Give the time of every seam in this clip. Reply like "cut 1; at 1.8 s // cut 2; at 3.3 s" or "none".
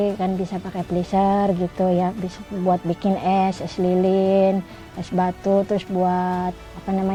none